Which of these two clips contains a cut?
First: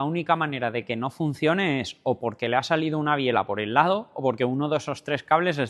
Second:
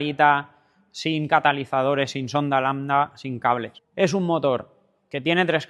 second; 1 cut; at 3.8 s

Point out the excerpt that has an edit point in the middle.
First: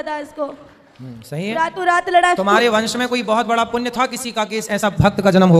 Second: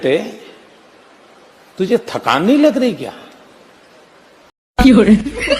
second; 1 cut; at 4.7 s

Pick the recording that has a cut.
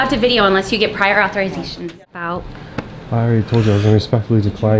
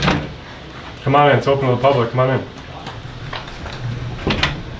first; 1 cut; at 1.9 s

